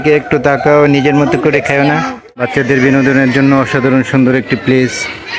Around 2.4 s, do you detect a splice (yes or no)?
yes